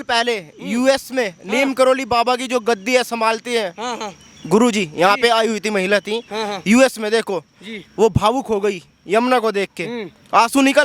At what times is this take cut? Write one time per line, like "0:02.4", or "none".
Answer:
none